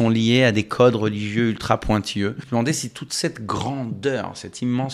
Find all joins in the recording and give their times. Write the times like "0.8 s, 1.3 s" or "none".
2.4 s

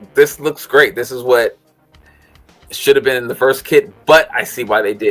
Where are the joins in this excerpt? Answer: none

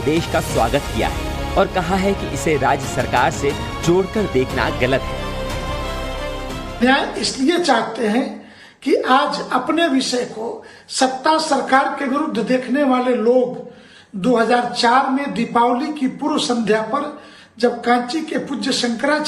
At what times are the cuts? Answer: 15.9 s

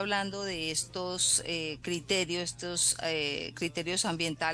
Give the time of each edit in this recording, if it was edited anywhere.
none

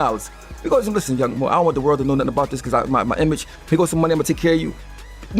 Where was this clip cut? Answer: none

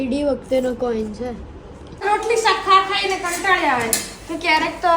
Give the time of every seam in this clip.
2.0 s

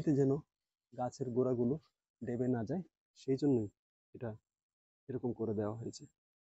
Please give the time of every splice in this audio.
none

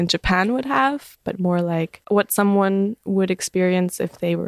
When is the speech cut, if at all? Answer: 2.0 s

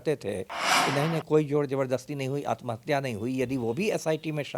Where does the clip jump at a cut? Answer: none

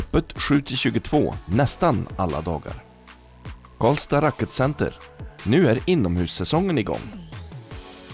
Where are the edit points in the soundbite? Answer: 7.0 s

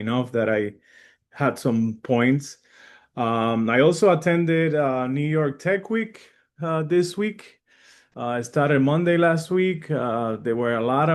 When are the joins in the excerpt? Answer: none

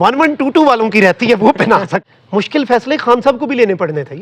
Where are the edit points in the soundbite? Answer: 2.1 s

